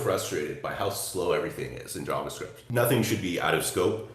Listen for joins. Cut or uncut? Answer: cut